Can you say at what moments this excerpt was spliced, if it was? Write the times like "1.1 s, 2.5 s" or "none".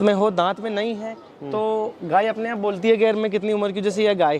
none

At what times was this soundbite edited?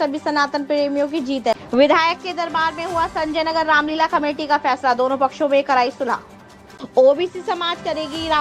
1.5 s, 6.8 s

